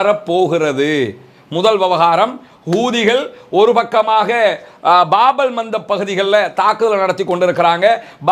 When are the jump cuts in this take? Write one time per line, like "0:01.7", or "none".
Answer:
none

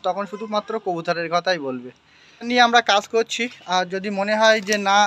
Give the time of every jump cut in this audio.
0:02.5

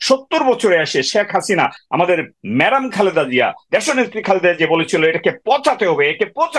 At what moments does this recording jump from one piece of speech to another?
0:02.0

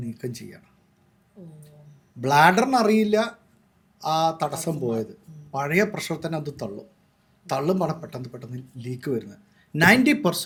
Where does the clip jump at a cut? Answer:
none

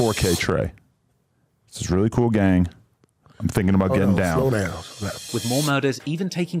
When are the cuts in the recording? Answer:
0:05.2

